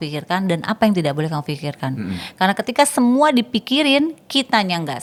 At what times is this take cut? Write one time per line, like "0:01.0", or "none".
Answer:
none